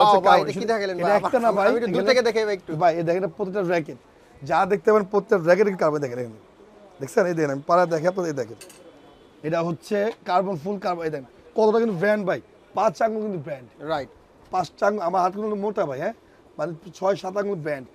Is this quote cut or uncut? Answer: uncut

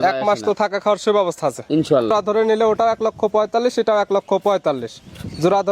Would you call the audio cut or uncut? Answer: cut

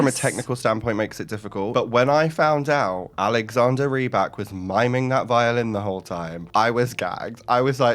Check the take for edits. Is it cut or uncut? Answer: uncut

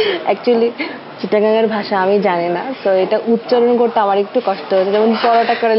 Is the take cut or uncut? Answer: uncut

